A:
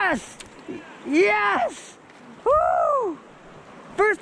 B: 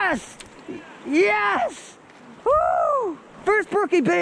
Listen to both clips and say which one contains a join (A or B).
B